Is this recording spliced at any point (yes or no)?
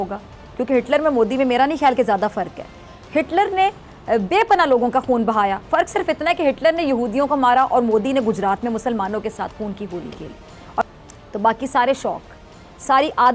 yes